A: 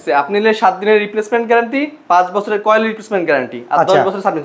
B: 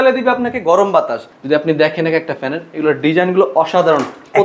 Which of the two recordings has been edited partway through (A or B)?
B